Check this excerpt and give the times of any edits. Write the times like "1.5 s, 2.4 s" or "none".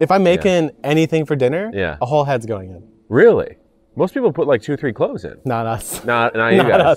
5.3 s